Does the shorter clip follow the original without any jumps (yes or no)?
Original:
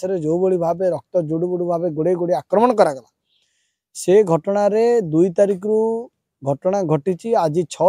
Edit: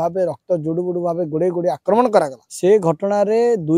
no